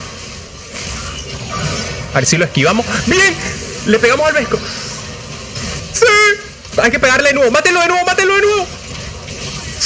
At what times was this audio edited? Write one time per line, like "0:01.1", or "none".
0:05.8